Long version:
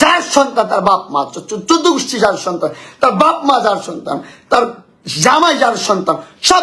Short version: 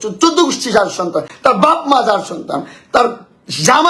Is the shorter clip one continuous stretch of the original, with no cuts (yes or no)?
no